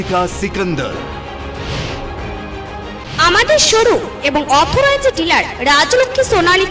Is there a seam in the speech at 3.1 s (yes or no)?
yes